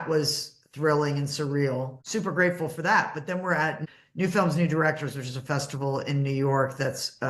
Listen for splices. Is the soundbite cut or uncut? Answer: cut